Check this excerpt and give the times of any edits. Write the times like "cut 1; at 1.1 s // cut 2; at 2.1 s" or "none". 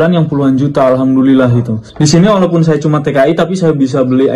cut 1; at 1.8 s